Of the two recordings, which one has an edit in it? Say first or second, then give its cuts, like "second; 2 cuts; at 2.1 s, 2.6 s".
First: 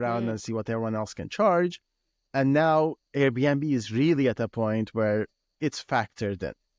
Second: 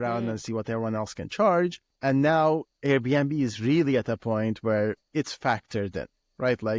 second; 2 cuts; at 1.9 s, 5.0 s